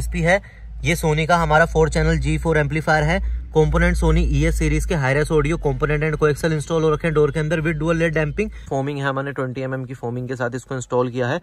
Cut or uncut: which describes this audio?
cut